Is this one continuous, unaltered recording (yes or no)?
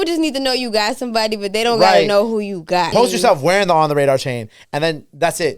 no